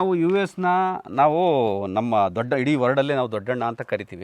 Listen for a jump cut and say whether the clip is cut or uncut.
uncut